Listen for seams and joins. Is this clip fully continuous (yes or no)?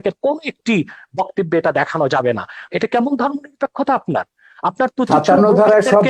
no